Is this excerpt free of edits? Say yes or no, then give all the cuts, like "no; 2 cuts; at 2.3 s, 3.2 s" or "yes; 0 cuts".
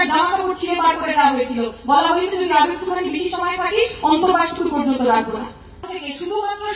no; 1 cut; at 5.8 s